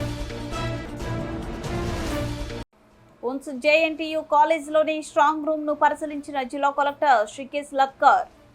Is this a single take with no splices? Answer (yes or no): no